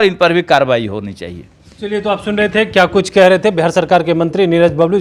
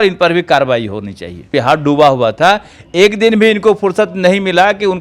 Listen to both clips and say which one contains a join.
second; 1 cut; at 1.5 s

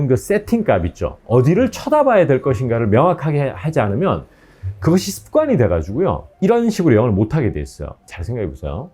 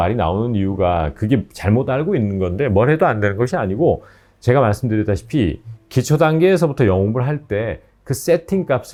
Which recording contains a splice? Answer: first; 1 cut; at 8.0 s

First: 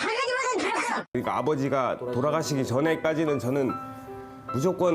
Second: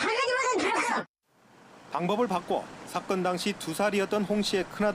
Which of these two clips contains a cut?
first; 1 cut; at 1.2 s

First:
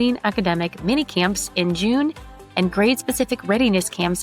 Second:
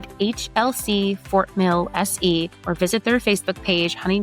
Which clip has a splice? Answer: second; 1 cut; at 2.6 s

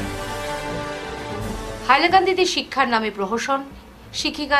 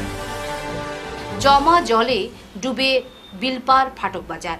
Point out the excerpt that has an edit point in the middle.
first; 1 cut; at 1.0 s

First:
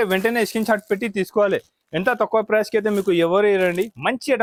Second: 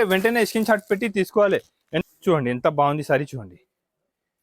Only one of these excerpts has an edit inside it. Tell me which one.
second; 1 cut; at 1.9 s

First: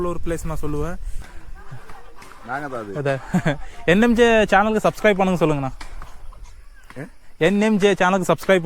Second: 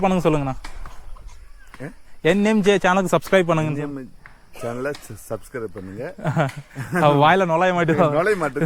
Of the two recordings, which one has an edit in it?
first; 1 cut; at 1.2 s

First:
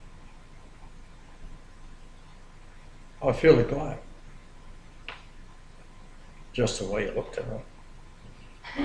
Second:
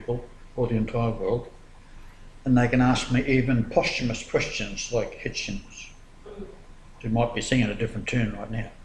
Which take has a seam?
first; 1 cut; at 2.4 s

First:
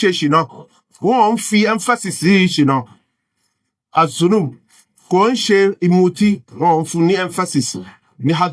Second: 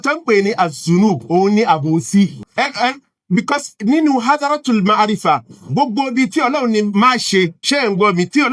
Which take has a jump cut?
second; 2 cuts; at 2.4 s, 7.6 s

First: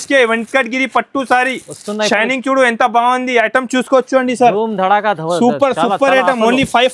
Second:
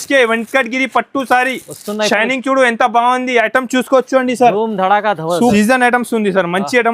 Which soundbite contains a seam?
second; 1 cut; at 5.5 s

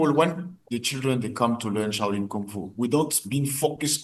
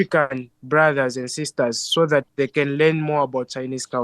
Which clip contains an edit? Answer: second; 1 cut; at 2.3 s

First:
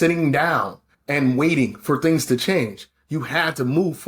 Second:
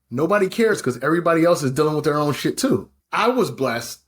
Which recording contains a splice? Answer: second; 1 cut; at 3.0 s

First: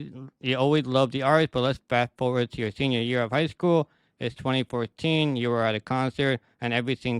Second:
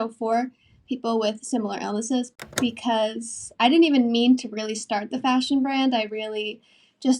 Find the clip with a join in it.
second; 1 cut; at 2.3 s

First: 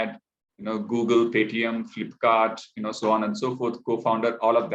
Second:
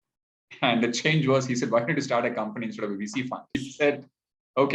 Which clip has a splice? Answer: second; 1 cut; at 3.6 s

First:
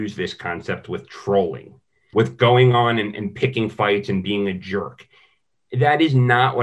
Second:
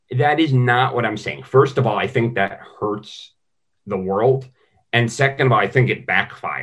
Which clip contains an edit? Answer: first; 1 cut; at 2.1 s

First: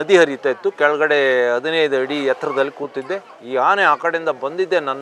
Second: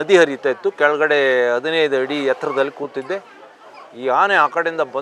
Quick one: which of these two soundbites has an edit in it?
first; 1 cut; at 3.3 s

